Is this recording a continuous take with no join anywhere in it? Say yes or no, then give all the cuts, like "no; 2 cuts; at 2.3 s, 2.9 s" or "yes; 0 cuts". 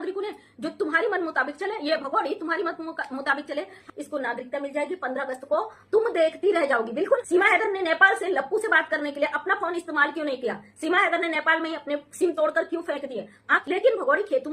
no; 3 cuts; at 3.8 s, 7.2 s, 13.5 s